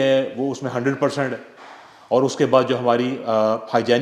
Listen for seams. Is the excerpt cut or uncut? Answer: uncut